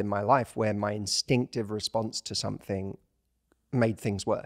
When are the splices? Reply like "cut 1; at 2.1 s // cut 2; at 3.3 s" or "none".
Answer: none